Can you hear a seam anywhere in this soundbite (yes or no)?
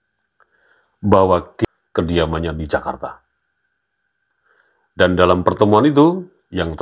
yes